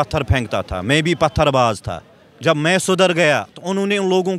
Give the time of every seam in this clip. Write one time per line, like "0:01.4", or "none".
none